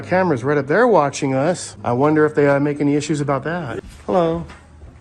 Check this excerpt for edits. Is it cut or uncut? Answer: cut